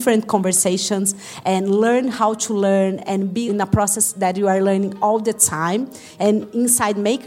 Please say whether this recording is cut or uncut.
cut